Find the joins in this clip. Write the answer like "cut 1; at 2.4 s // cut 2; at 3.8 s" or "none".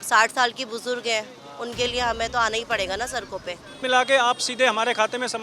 cut 1; at 3.8 s